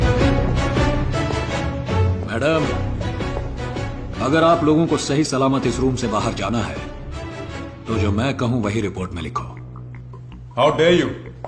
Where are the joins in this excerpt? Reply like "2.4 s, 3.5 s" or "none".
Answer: none